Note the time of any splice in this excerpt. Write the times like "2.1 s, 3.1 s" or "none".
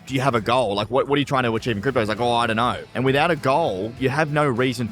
2.9 s